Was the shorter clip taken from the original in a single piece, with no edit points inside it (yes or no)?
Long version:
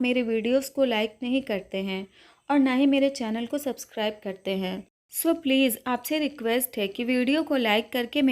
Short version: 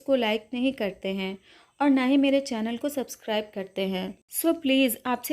no